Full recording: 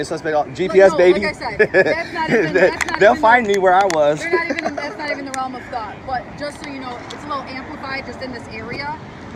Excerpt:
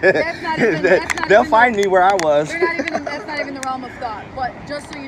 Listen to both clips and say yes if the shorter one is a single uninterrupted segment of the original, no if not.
yes